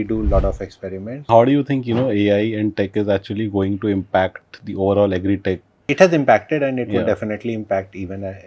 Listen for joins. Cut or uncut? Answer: cut